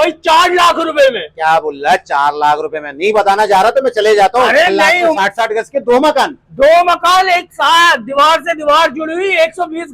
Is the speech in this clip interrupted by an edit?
yes; 1 cut; at 5.1 s

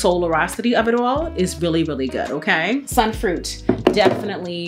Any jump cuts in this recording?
no; 0 cuts

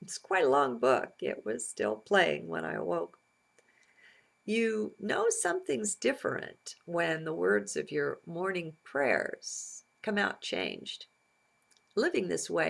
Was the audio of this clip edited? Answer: no; 0 cuts

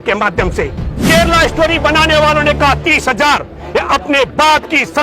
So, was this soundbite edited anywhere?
yes; 1 cut; at 0.9 s

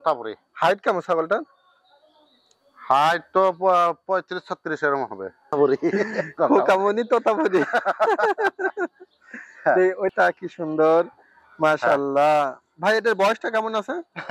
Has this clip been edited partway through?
yes; 2 cuts; at 5.5 s, 10.1 s

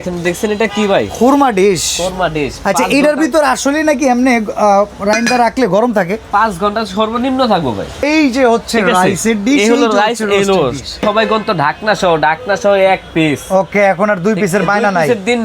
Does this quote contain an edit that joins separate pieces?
yes; 2 cuts; at 8.0 s, 11.0 s

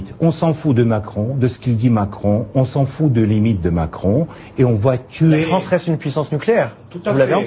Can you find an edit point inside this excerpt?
no; 0 cuts

